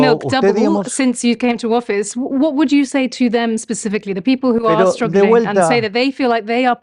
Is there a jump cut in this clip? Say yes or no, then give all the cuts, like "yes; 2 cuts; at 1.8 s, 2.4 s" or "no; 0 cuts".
no; 0 cuts